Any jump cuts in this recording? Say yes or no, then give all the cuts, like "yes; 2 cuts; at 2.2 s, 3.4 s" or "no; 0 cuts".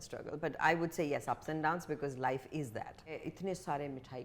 yes; 1 cut; at 3.2 s